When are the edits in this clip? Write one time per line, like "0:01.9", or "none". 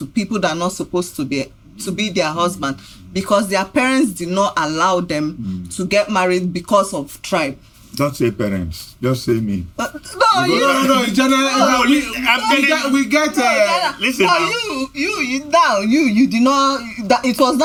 none